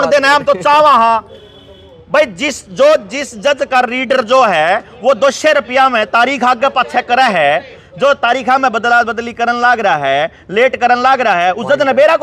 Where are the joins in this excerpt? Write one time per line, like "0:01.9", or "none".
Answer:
none

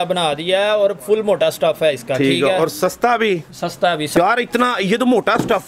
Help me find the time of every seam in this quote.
0:04.1

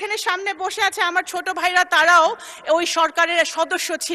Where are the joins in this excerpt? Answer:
none

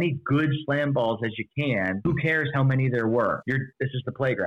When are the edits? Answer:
0:02.0
0:03.4

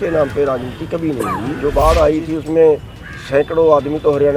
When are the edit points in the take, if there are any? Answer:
0:01.6

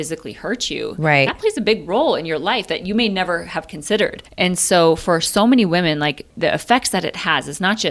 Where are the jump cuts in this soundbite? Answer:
0:04.2
0:06.3

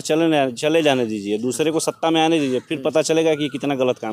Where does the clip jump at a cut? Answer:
none

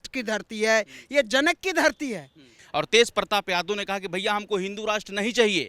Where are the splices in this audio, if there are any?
0:02.5

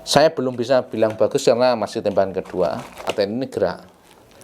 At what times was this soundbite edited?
0:03.1

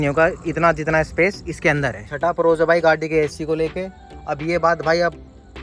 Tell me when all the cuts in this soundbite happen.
none

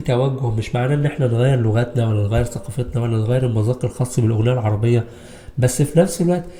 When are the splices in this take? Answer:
none

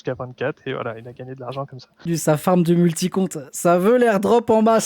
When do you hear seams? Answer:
0:02.0

